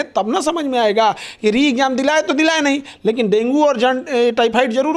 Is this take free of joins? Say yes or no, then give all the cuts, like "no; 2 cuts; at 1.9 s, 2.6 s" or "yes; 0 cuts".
yes; 0 cuts